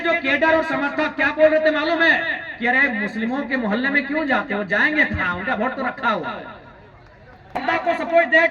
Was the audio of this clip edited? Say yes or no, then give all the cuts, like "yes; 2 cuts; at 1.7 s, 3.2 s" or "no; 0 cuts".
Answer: yes; 1 cut; at 7.6 s